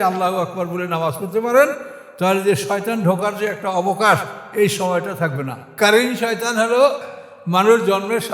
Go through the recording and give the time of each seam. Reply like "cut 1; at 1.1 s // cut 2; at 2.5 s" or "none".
cut 1; at 5.7 s // cut 2; at 7.0 s

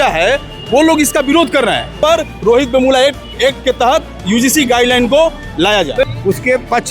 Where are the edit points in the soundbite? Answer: cut 1; at 2.0 s // cut 2; at 6.0 s

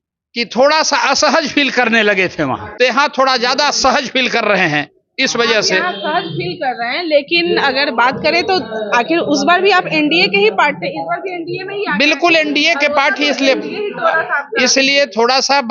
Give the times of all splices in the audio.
cut 1; at 2.7 s

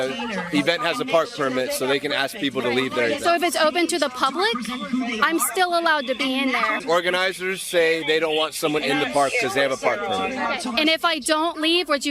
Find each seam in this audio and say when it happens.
cut 1; at 3.7 s // cut 2; at 6.8 s

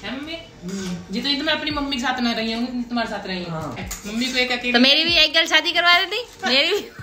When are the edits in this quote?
cut 1; at 3.9 s

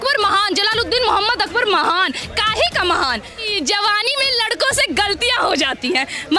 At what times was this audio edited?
cut 1; at 3.4 s

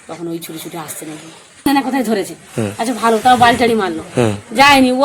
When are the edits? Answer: cut 1; at 1.7 s

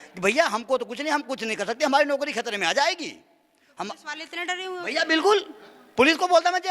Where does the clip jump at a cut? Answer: none

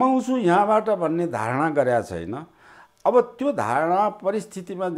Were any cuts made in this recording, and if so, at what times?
none

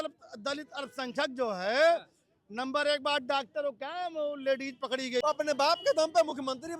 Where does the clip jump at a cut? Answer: cut 1; at 5.2 s

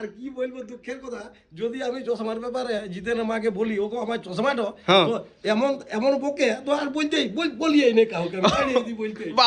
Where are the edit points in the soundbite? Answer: none

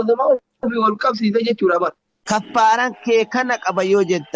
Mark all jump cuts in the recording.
cut 1; at 2.1 s

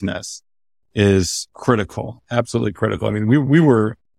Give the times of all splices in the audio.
cut 1; at 1.4 s

